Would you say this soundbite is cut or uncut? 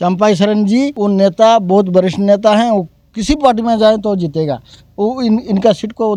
uncut